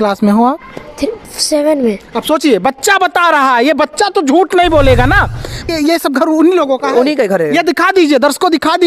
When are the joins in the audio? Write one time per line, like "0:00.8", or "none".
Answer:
0:05.7